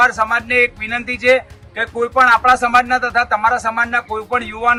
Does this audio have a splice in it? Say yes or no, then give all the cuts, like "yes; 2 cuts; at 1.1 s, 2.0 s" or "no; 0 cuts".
no; 0 cuts